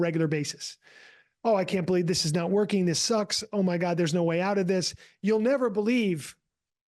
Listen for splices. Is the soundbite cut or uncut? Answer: uncut